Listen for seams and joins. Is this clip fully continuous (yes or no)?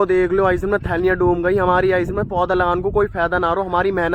yes